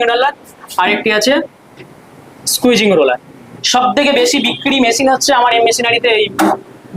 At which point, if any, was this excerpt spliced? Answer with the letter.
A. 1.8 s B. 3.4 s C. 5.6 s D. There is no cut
B